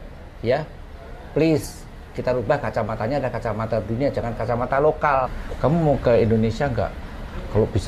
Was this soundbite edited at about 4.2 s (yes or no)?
no